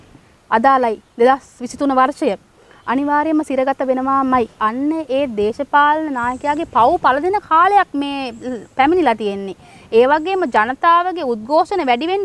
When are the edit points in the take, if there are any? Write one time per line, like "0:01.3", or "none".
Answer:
none